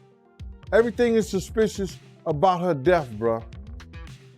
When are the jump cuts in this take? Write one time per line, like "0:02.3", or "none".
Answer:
none

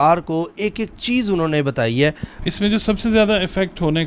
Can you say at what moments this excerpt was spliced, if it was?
0:02.3

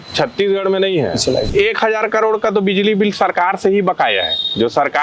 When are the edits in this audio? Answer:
0:01.5

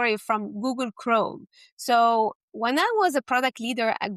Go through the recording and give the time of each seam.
none

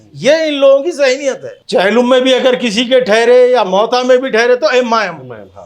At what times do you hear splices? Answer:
0:01.5

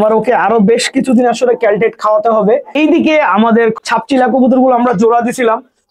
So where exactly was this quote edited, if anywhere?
0:02.7

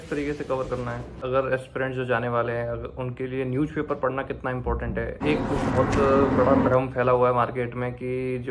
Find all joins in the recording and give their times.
0:01.2
0:05.2

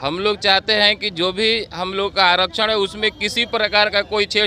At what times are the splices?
none

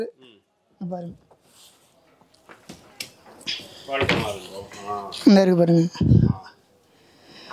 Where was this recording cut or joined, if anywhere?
none

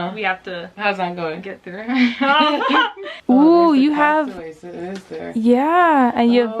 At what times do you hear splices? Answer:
0:03.1

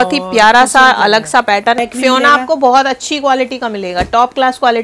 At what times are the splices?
0:01.8

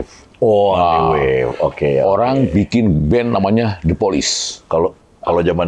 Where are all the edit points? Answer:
none

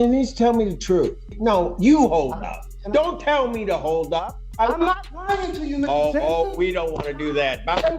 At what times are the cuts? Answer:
0:01.4
0:04.4

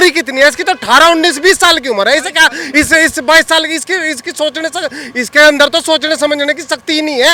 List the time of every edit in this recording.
none

